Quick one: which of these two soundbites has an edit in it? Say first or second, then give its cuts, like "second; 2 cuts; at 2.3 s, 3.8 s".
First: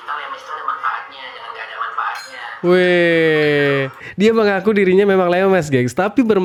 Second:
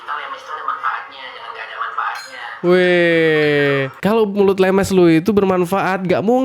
second; 1 cut; at 3.9 s